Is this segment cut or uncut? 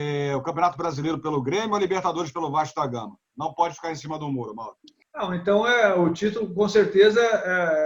cut